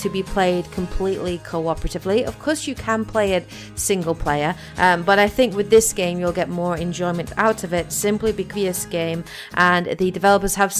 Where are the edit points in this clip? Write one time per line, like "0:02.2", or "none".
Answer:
none